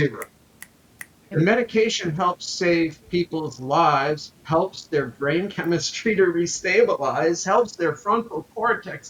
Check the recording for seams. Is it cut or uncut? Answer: cut